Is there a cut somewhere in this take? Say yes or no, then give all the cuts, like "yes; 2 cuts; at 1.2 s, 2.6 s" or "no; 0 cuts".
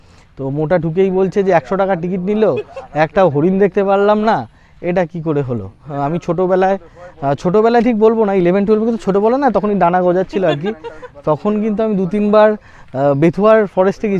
yes; 1 cut; at 5.9 s